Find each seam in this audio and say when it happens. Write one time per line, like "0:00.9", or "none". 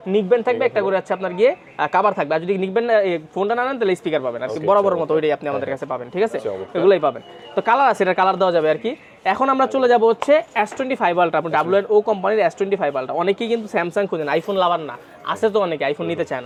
none